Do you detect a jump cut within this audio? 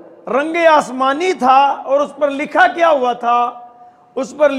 no; 0 cuts

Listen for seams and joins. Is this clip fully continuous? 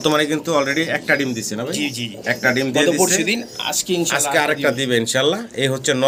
yes; 0 cuts

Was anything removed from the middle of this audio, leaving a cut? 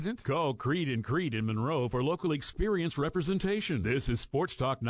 no; 0 cuts

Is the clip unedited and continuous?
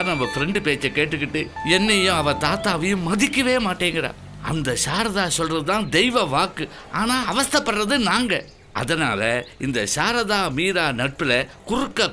yes; 0 cuts

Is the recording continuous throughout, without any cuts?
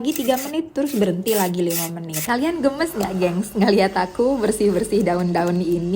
no; 1 cut; at 2.1 s

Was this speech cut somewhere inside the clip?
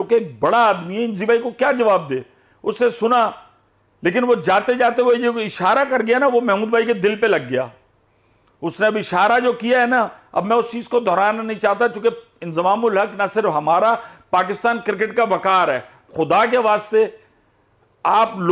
no; 0 cuts

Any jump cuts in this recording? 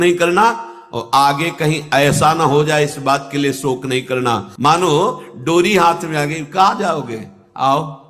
yes; 1 cut; at 4.5 s

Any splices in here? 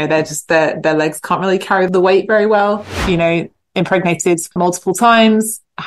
yes; 3 cuts; at 1.9 s, 2.9 s, 4.5 s

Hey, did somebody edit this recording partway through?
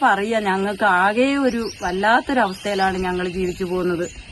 no; 0 cuts

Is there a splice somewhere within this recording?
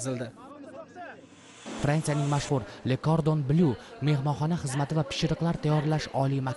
yes; 1 cut; at 1.7 s

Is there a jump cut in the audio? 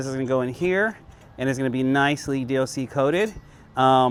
no; 0 cuts

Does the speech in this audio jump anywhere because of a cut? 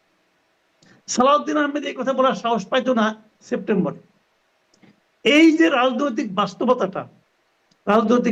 no; 0 cuts

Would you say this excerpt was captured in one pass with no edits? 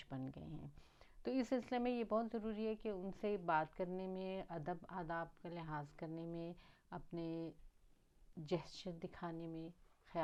yes; 0 cuts

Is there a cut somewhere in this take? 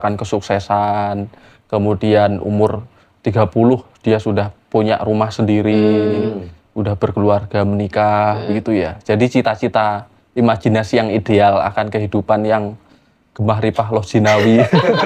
no; 0 cuts

